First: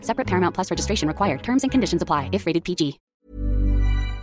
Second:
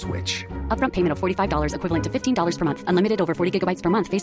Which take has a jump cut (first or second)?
first